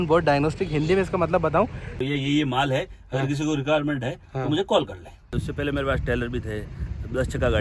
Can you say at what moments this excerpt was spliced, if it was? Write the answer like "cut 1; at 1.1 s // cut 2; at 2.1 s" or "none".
cut 1; at 1.9 s // cut 2; at 5.3 s